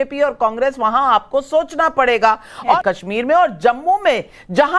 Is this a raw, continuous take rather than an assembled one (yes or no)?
no